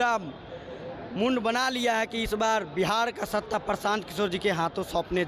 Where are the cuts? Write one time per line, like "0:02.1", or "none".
none